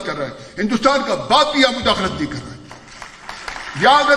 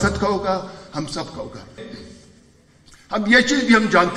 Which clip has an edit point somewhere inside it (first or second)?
second